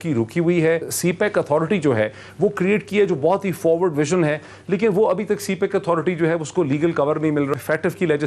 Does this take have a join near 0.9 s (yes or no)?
yes